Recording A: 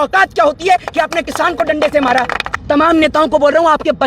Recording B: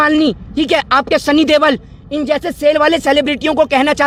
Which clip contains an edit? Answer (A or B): A